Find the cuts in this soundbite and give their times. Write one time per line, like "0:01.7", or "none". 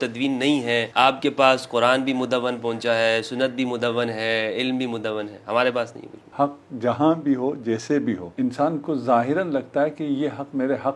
0:00.9
0:06.3
0:08.3